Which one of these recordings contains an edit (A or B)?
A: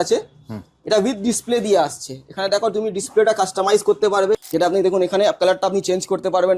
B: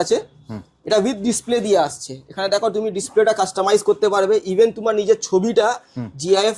A